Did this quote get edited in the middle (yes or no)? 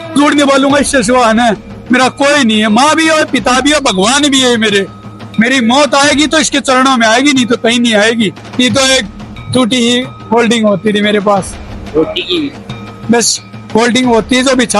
yes